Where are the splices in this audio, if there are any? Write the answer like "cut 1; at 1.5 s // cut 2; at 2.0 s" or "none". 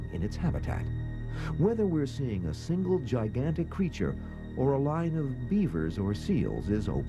none